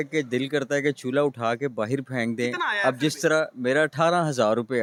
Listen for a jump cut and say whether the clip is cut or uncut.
uncut